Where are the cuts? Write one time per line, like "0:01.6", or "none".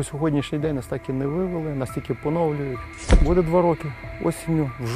0:03.1